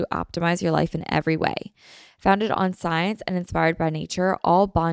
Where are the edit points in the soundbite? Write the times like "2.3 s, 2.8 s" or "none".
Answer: none